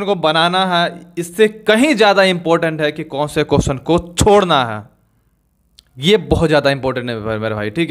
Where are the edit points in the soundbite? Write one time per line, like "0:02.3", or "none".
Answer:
none